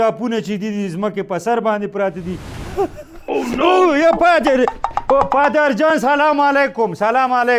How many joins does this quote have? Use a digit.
1